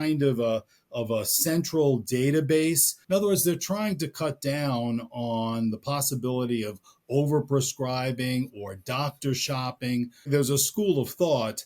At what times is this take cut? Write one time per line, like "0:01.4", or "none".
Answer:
0:02.9
0:10.3